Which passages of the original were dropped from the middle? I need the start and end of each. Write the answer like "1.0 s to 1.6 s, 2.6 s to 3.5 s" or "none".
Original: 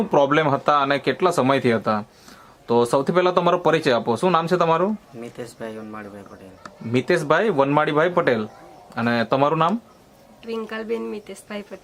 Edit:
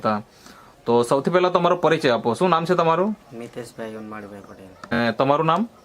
6.8 s to 9.1 s